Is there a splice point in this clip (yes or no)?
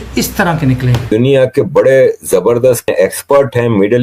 yes